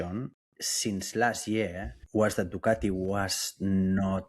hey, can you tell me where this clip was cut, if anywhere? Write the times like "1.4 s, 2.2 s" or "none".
2.0 s